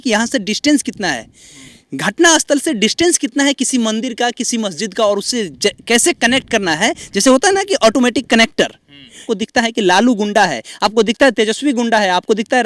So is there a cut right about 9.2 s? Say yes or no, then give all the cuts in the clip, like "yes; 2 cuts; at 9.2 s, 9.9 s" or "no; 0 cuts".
yes; 1 cut; at 9.2 s